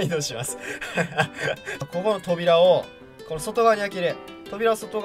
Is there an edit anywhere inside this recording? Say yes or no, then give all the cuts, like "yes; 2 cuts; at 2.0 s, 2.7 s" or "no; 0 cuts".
yes; 1 cut; at 1.7 s